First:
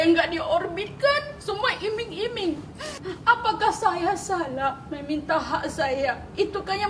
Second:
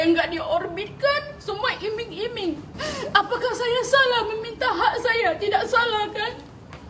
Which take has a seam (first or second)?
first